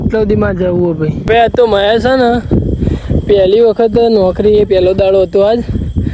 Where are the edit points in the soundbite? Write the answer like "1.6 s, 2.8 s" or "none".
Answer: 1.2 s